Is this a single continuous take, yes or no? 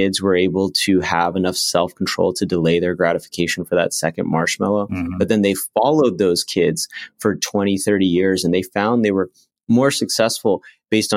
yes